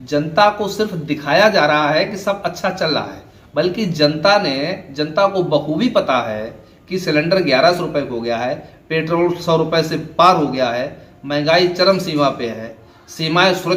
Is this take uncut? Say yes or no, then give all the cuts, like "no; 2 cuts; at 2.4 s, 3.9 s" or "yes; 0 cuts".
yes; 0 cuts